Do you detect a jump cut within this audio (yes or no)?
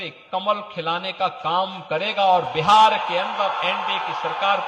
no